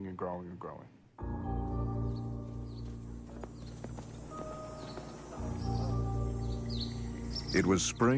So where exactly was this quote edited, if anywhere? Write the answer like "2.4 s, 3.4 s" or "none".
5.8 s

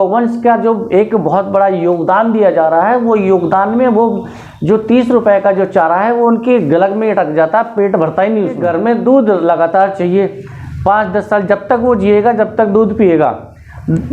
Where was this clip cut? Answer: 8.6 s

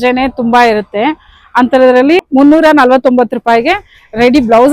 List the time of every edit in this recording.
2.3 s

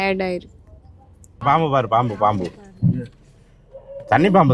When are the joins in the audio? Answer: 1.4 s

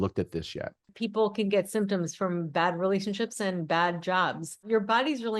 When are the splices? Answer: 0.9 s, 4.6 s

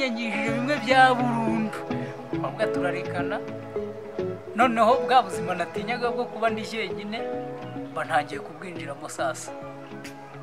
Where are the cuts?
none

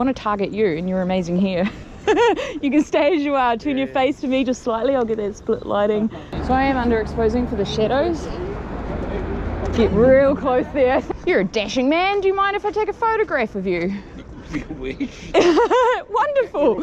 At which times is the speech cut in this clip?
6.3 s, 11.1 s

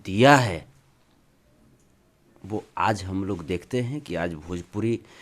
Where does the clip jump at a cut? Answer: none

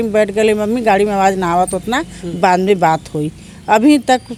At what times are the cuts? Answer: none

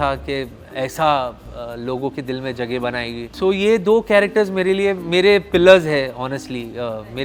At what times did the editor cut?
none

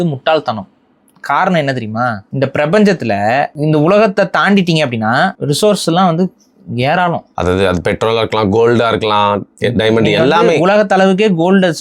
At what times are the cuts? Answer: 2.2 s, 3.5 s, 5.4 s, 7.3 s

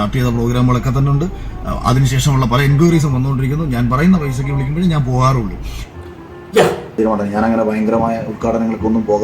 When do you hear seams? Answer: 6.9 s

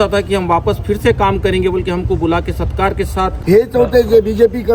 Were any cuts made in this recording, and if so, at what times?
3.3 s

